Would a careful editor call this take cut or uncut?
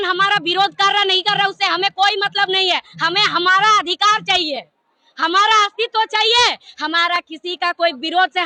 uncut